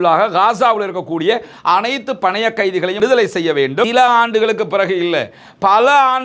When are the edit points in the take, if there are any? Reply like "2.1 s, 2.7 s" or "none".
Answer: 3.0 s, 3.9 s